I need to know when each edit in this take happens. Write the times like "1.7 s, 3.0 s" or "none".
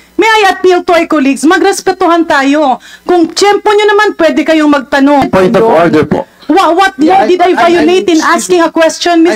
5.3 s